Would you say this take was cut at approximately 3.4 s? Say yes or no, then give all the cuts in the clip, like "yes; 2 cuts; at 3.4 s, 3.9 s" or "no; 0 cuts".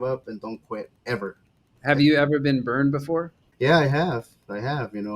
yes; 2 cuts; at 1.7 s, 3.4 s